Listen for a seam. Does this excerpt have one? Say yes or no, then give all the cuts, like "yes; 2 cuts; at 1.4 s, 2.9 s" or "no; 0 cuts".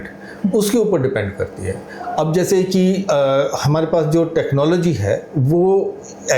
no; 0 cuts